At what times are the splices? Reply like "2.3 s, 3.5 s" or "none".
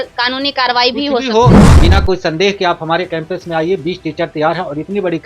1.7 s